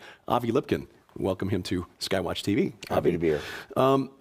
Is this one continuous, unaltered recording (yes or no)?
no